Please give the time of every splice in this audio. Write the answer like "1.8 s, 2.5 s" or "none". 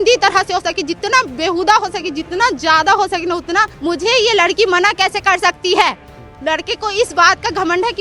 3.7 s